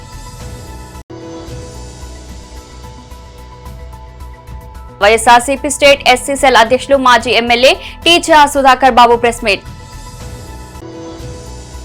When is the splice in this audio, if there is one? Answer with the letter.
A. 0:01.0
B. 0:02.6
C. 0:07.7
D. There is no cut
A